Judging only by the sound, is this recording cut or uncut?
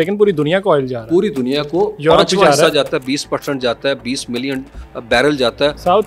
uncut